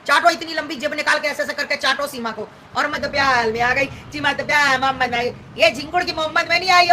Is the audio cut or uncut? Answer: cut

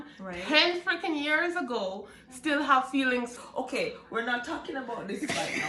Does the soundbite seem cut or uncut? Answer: cut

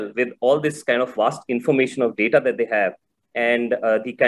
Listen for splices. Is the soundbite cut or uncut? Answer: uncut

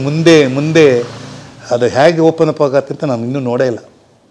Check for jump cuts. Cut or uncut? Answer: uncut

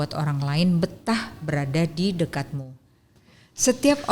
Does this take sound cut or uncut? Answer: cut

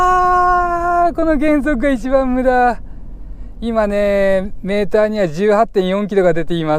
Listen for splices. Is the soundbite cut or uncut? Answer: uncut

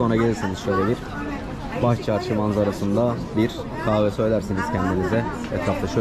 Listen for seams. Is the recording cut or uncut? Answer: uncut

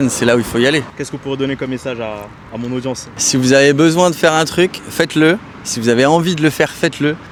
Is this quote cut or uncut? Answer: uncut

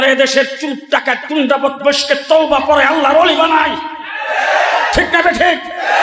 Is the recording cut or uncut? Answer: uncut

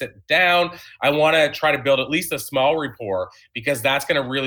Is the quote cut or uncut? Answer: uncut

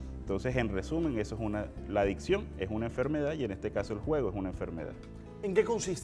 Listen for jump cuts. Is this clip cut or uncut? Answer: uncut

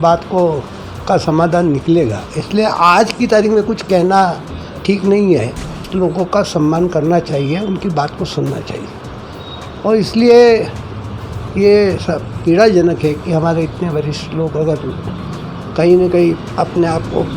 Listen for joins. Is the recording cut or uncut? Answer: cut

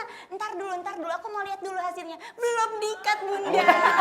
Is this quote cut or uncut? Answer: uncut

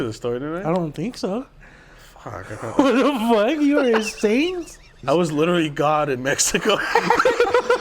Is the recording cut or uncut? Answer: cut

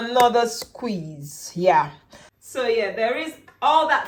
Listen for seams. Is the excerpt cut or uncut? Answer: uncut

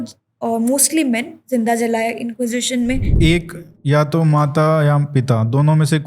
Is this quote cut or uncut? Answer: cut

